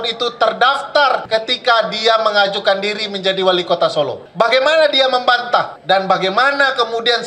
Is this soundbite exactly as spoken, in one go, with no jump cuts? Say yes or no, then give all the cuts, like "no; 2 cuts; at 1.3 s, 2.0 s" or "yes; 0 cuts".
no; 3 cuts; at 1.2 s, 4.2 s, 5.7 s